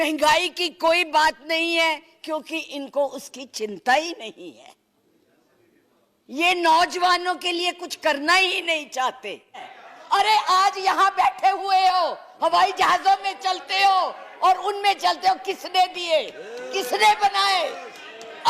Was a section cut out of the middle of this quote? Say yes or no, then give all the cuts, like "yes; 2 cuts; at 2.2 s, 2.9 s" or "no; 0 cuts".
yes; 1 cut; at 9.8 s